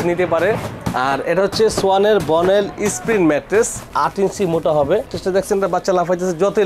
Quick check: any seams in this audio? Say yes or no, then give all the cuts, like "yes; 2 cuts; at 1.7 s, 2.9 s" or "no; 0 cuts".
yes; 1 cut; at 5.1 s